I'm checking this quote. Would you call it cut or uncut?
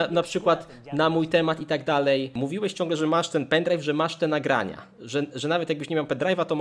uncut